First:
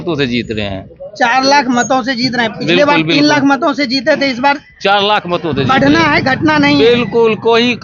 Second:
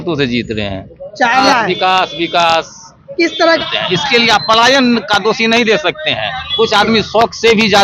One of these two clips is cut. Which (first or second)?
second